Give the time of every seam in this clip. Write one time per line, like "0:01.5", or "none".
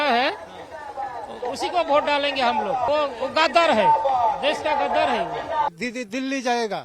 0:02.9
0:05.8